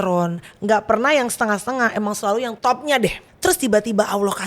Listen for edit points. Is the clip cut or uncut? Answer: cut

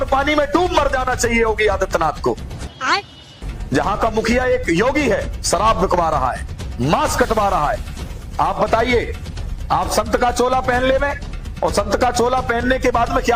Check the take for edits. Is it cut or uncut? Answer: uncut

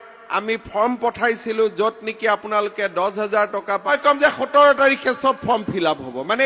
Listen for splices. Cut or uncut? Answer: cut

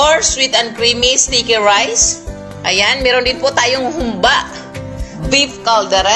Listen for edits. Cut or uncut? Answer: cut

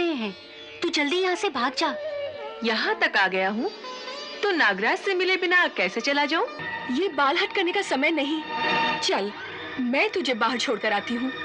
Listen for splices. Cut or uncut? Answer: cut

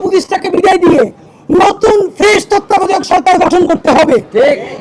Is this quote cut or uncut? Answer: uncut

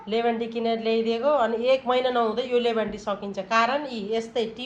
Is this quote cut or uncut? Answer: uncut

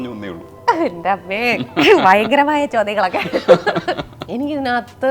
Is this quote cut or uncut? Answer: cut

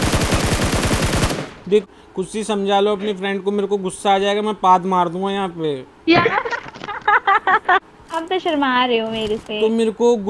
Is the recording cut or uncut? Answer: cut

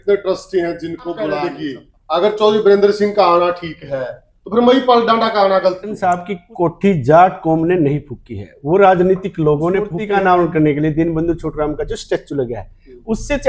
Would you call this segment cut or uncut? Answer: cut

